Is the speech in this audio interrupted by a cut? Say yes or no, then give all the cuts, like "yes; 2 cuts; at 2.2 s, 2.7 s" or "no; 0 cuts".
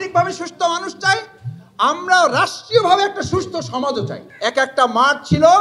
yes; 1 cut; at 4.3 s